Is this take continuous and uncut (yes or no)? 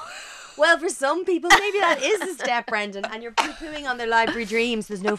yes